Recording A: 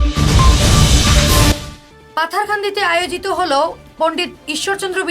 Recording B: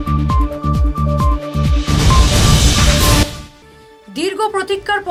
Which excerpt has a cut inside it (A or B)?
A